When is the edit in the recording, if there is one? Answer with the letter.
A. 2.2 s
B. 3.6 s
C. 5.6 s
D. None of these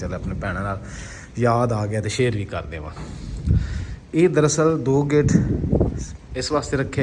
D